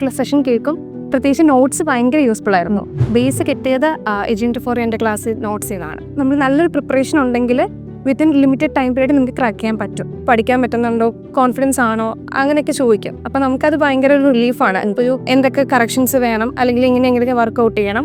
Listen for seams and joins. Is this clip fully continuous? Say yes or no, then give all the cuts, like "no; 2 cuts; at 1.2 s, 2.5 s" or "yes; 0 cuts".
no; 4 cuts; at 3.0 s, 6.0 s, 10.1 s, 15.2 s